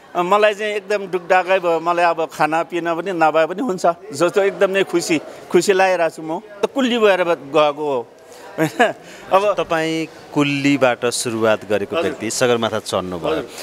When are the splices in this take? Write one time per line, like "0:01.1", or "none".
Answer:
0:06.5